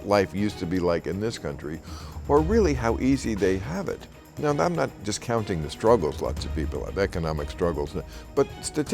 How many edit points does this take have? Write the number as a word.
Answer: one